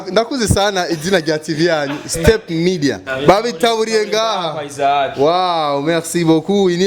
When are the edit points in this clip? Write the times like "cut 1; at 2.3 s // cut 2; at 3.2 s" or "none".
cut 1; at 3.1 s